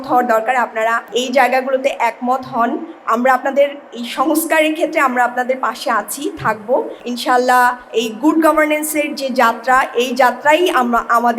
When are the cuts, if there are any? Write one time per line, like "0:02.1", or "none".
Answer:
0:01.1
0:07.0
0:07.8

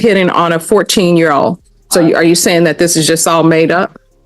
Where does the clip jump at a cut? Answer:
0:01.7

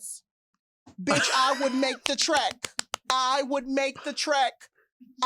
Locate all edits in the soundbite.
none

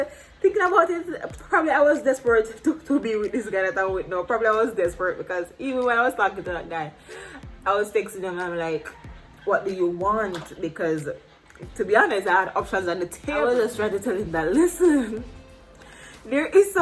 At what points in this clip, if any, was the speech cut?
0:13.4

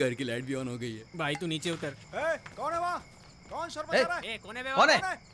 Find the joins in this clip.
0:01.0
0:02.0

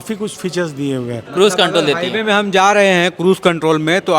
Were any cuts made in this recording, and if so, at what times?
0:01.2

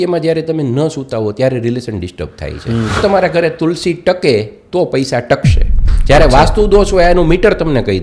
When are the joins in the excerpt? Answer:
0:03.0

